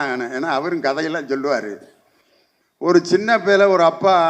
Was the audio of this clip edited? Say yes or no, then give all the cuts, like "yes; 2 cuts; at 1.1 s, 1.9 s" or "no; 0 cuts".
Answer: no; 0 cuts